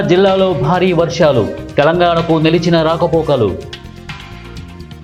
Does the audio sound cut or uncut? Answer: uncut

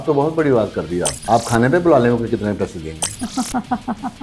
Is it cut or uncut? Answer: cut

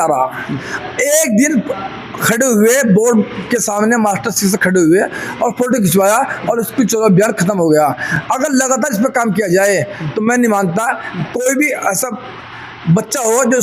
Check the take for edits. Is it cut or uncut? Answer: uncut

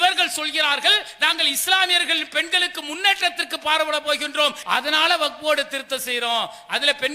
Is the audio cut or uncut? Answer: cut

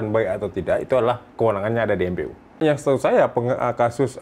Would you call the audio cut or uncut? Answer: cut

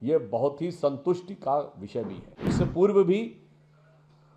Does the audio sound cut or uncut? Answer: cut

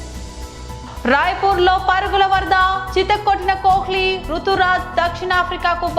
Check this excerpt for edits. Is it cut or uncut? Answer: cut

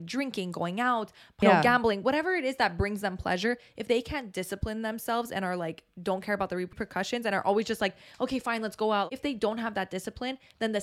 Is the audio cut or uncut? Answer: cut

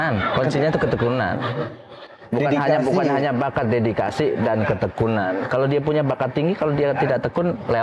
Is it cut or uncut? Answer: uncut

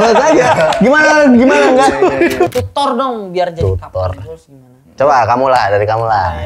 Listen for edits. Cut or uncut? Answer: cut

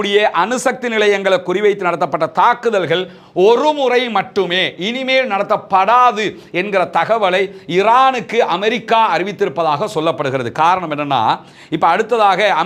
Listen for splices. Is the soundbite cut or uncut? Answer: uncut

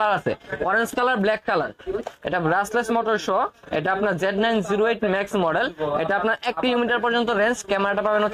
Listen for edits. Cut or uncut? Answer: cut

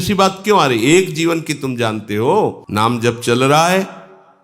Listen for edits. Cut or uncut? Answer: cut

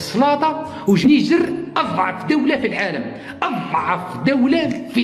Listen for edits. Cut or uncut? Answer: cut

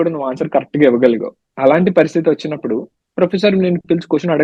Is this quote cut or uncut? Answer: uncut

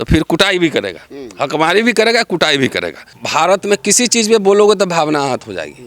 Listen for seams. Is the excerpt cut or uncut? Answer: cut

